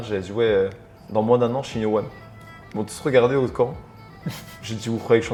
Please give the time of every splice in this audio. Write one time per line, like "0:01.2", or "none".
none